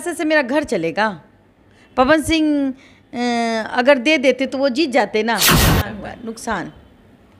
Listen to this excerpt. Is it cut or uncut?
cut